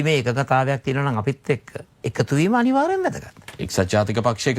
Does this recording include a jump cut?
no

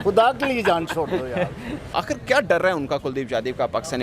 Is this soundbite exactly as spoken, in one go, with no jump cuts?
no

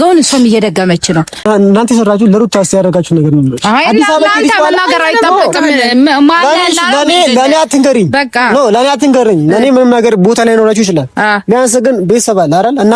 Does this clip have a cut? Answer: yes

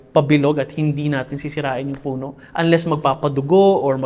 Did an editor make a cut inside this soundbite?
no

